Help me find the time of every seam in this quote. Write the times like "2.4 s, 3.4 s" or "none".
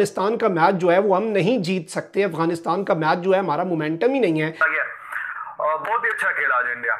4.6 s